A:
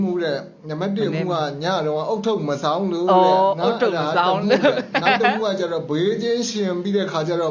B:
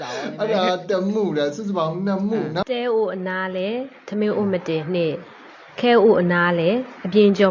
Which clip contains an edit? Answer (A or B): B